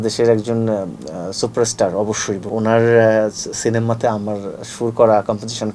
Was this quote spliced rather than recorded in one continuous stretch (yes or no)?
yes